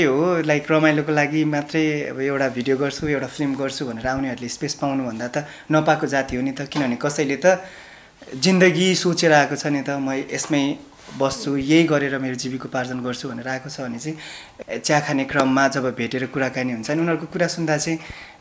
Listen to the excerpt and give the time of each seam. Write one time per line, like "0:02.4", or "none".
0:14.4